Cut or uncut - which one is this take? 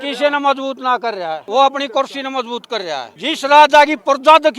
cut